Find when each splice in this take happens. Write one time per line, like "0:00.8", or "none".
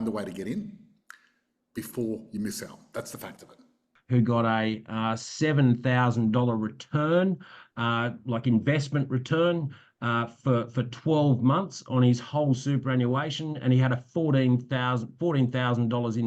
0:03.9